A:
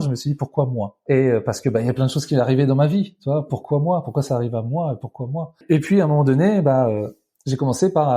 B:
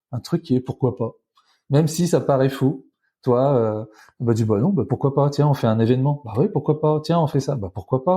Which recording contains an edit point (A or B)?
A